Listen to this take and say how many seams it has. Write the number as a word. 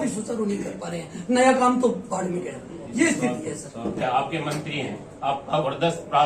one